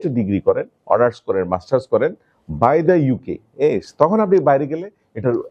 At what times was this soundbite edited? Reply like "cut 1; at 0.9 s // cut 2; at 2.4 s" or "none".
none